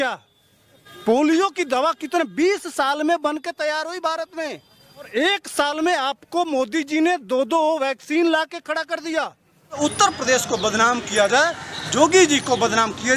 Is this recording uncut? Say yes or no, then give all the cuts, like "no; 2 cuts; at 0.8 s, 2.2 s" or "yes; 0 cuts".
no; 3 cuts; at 0.9 s, 5.1 s, 9.8 s